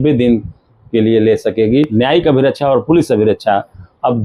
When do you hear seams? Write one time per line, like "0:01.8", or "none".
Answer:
0:01.9